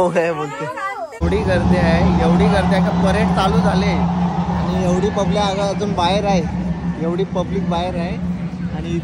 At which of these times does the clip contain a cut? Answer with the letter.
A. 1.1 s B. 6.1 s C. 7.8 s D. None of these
A